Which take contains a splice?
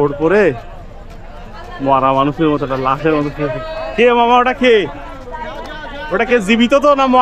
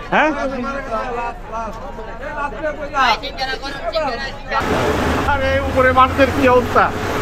second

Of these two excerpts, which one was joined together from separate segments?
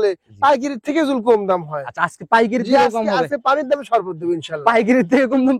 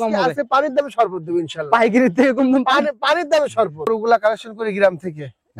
second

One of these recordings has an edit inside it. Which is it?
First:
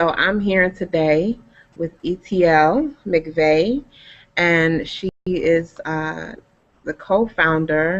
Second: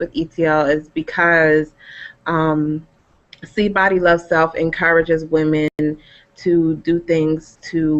second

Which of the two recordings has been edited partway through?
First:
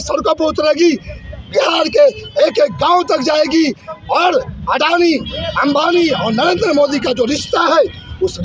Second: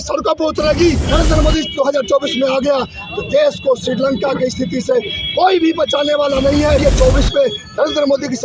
second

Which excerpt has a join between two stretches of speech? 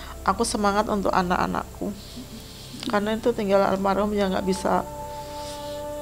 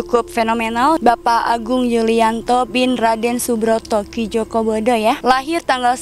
second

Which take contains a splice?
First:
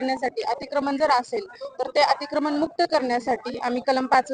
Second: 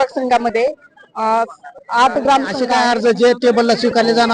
second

